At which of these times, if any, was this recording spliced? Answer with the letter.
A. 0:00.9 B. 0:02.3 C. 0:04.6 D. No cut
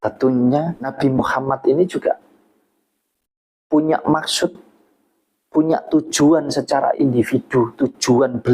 A